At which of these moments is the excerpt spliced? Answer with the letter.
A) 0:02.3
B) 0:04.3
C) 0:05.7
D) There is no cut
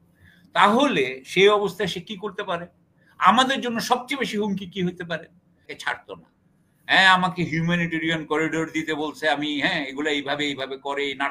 C